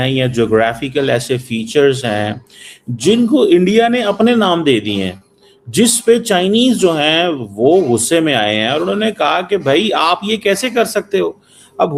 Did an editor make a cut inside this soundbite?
no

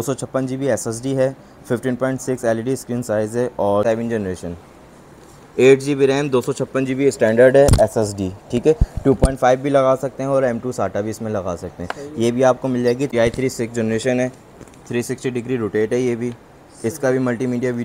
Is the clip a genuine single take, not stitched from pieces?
no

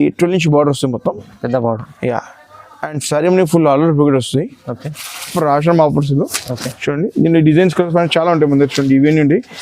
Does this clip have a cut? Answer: yes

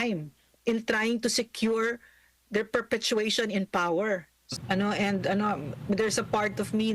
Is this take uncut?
no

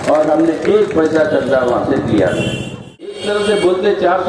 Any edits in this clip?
yes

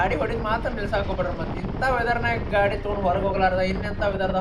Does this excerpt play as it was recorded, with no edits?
yes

